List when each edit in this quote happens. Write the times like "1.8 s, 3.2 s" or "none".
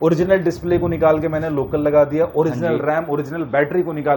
none